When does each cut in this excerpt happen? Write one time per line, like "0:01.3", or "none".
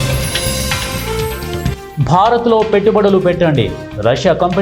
0:01.8